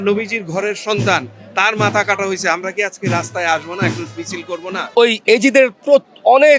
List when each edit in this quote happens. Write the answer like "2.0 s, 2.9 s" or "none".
4.8 s